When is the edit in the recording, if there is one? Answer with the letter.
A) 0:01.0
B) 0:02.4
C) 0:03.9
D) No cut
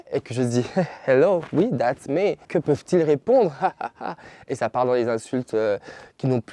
B